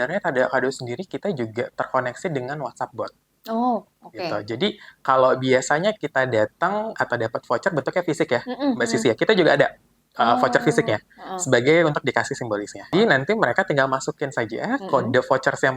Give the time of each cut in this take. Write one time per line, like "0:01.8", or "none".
0:12.9